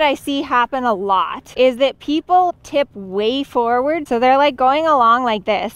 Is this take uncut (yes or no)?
no